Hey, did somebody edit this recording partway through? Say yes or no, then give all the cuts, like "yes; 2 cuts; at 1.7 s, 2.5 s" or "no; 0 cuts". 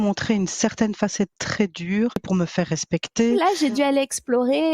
yes; 2 cuts; at 2.2 s, 3.4 s